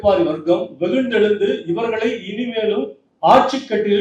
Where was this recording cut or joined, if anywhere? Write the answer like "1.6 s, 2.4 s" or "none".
3.0 s